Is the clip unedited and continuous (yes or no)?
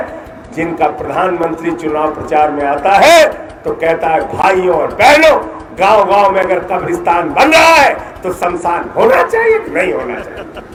yes